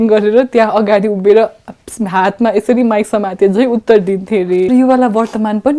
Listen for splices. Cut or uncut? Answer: cut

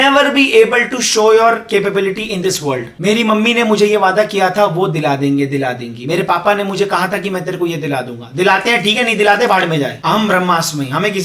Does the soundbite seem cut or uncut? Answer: cut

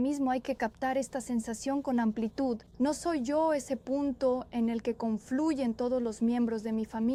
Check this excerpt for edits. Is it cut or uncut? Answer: uncut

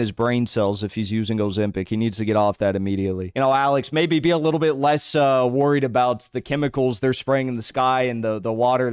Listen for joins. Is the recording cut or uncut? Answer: cut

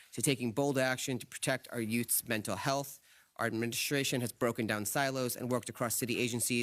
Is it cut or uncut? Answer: cut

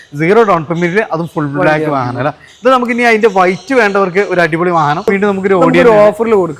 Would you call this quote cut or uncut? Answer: cut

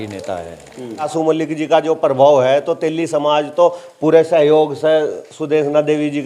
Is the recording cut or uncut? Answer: cut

